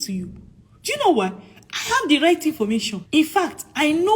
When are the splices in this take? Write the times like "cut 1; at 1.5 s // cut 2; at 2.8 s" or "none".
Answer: cut 1; at 3.0 s